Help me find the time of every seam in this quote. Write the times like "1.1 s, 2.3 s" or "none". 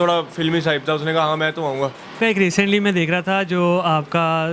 2.1 s